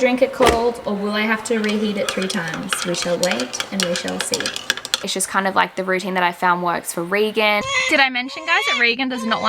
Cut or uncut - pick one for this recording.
cut